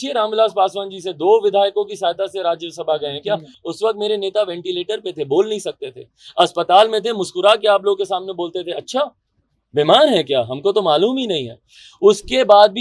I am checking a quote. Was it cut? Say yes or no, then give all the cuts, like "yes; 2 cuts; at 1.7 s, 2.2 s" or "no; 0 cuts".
no; 0 cuts